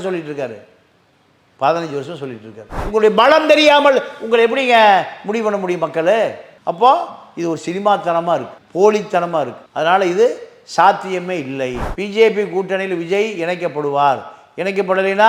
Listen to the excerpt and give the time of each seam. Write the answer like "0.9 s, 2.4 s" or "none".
2.8 s, 12.0 s